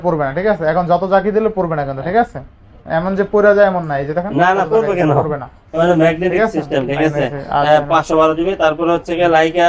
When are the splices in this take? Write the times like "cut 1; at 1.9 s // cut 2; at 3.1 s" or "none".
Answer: none

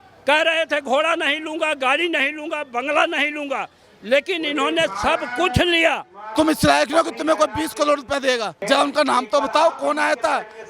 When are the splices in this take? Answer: cut 1; at 6.3 s // cut 2; at 8.5 s

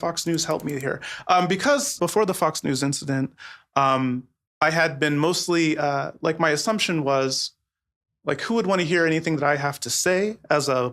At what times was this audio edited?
cut 1; at 2.0 s

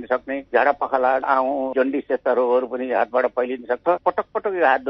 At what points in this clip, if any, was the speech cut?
cut 1; at 1.2 s // cut 2; at 3.9 s

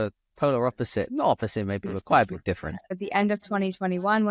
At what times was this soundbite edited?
cut 1; at 2.9 s

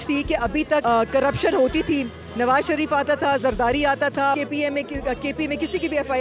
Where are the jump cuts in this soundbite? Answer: cut 1; at 4.3 s

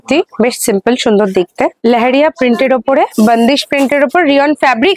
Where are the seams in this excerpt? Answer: cut 1; at 1.8 s // cut 2; at 3.1 s

